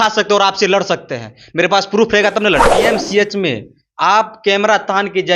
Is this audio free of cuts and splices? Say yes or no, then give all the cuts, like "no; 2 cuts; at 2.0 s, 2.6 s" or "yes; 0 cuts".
no; 1 cut; at 2.8 s